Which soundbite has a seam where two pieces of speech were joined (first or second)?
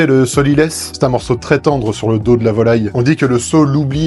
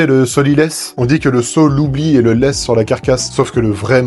second